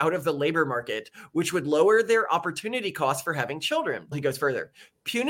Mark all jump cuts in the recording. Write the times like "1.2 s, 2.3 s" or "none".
4.2 s